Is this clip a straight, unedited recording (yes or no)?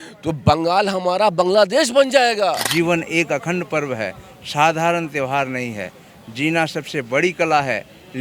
no